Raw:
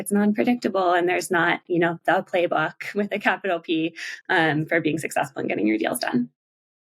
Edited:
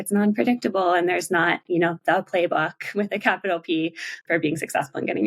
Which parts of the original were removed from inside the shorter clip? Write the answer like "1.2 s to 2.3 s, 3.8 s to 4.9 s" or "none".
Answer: 4.2 s to 4.7 s